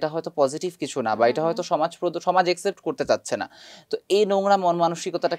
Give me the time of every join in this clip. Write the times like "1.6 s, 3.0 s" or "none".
none